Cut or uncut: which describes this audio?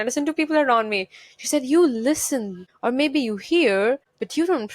uncut